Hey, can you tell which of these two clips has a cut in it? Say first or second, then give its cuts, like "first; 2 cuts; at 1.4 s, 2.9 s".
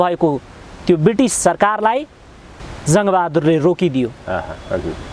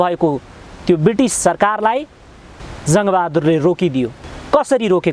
second; 1 cut; at 4.2 s